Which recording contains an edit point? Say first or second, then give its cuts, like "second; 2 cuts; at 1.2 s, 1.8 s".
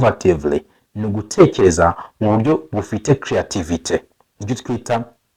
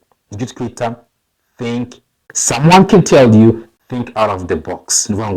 second; 1 cut; at 2.3 s